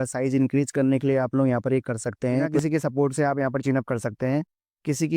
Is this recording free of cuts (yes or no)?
no